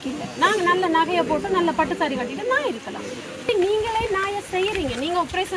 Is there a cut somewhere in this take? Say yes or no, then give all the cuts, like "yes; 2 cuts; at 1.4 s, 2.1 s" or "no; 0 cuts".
no; 0 cuts